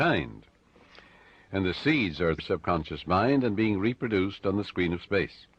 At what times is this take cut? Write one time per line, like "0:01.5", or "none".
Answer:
none

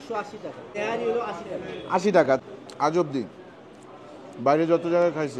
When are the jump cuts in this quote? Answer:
0:00.7
0:02.4

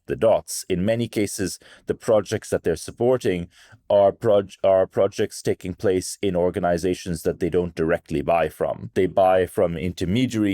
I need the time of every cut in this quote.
0:08.8

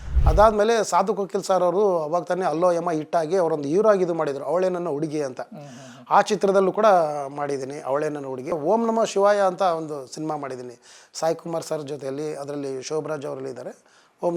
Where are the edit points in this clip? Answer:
0:08.6

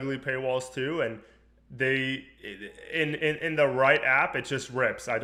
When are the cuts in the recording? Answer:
none

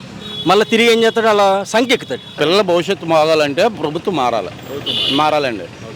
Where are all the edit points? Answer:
0:02.2

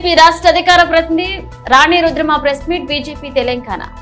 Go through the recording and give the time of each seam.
none

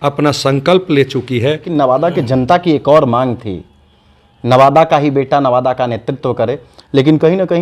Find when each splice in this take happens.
0:01.6

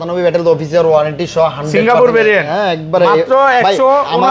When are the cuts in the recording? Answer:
none

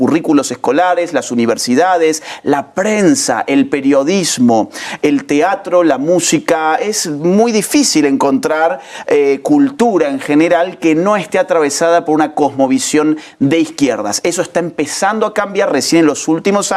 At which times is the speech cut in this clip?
none

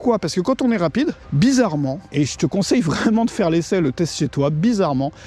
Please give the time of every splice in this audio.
0:01.2
0:02.0

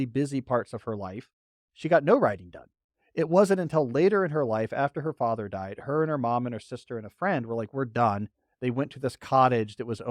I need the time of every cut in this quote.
none

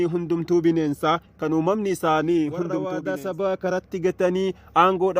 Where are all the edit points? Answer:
0:02.9

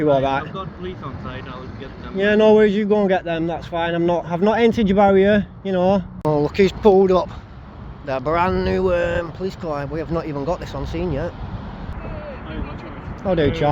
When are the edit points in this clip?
0:06.1
0:11.9

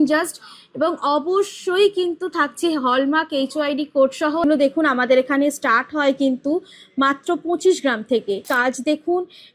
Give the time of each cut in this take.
0:04.4
0:08.5

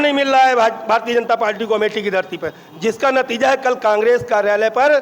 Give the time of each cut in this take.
none

